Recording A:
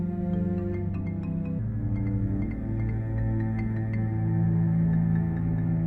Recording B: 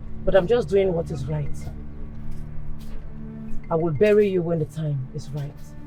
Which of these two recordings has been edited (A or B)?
A